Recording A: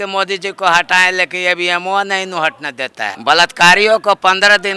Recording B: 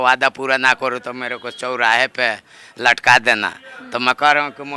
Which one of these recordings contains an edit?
A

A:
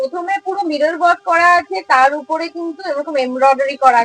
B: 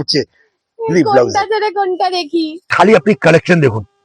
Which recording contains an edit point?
B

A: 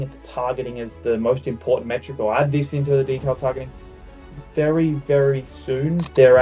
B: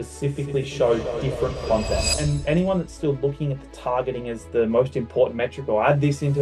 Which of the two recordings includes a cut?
B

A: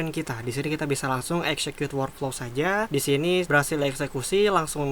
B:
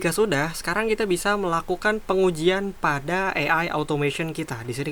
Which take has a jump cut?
A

